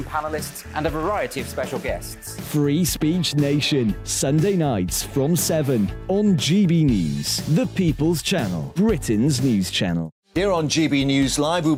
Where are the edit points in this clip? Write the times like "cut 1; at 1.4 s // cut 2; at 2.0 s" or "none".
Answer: none